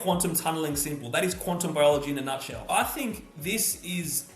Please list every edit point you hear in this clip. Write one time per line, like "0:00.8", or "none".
0:02.7